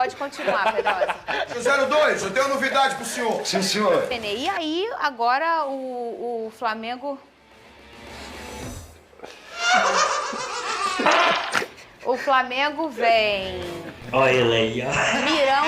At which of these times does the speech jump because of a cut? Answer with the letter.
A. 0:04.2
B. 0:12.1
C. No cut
A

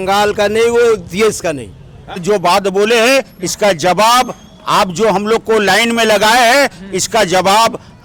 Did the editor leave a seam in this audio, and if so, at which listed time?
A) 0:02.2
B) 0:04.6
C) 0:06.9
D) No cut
A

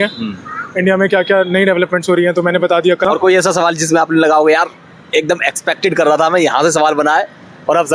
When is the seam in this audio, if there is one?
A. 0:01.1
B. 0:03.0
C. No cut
B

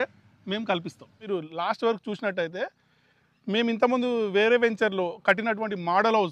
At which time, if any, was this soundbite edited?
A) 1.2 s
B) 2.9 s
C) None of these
A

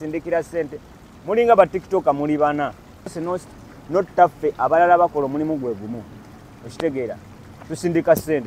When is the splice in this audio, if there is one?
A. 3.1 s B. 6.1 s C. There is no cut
A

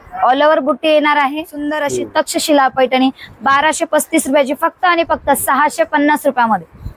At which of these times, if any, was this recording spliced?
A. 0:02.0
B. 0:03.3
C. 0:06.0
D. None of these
A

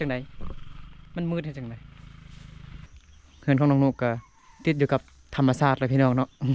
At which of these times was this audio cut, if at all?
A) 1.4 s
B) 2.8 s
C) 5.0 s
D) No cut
B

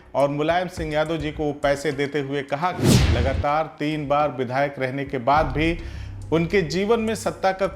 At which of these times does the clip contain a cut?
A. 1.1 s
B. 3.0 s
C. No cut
B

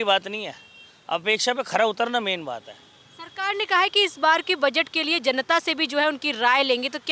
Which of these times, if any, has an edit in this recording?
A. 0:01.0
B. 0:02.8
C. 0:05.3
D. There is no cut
D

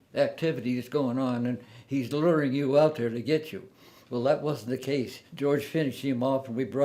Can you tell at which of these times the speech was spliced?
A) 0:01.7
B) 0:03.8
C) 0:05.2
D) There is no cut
C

